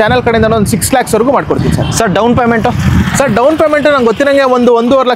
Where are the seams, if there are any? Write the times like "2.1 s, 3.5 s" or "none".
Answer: none